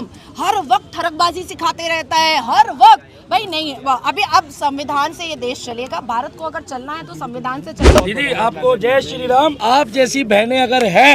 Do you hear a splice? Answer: yes; 1 cut; at 8.0 s

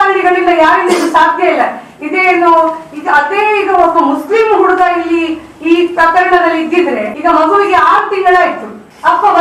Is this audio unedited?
yes; 0 cuts

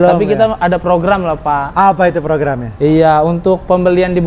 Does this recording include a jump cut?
no; 0 cuts

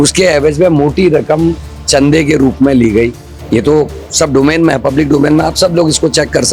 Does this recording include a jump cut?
no; 0 cuts

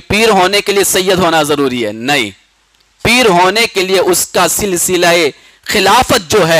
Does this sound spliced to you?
no; 0 cuts

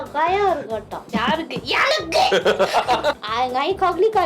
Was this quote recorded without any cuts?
no; 2 cuts; at 1.1 s, 3.2 s

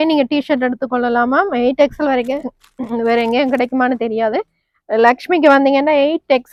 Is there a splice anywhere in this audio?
no; 0 cuts

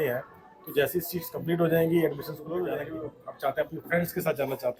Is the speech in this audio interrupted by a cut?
yes; 1 cut; at 2.6 s

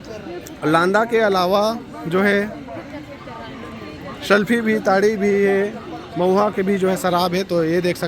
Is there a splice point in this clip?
no; 0 cuts

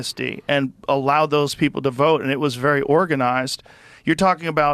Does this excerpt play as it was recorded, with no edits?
yes; 0 cuts

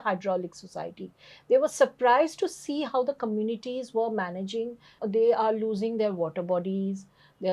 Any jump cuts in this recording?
yes; 1 cut; at 4.9 s

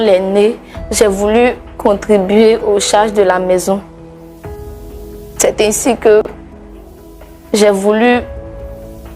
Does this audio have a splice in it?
no; 0 cuts

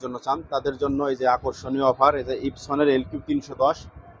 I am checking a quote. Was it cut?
no; 0 cuts

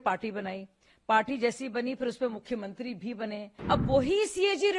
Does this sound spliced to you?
yes; 1 cut; at 3.5 s

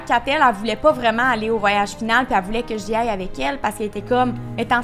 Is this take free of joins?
yes; 0 cuts

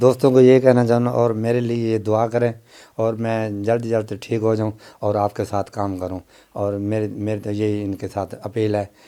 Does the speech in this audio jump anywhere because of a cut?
no; 0 cuts

